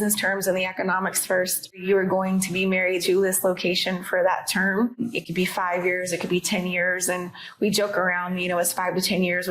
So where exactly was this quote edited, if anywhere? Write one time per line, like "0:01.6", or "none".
0:01.8
0:03.0
0:05.0